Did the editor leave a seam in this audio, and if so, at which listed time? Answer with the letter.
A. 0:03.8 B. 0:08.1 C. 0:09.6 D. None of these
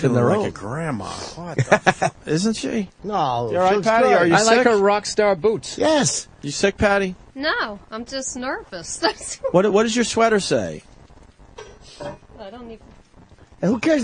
D